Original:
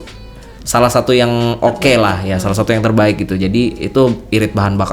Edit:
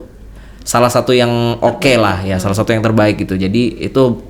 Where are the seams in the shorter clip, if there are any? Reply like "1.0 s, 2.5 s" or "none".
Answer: none